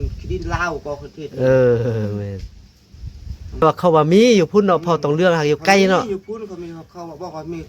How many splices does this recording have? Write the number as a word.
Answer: one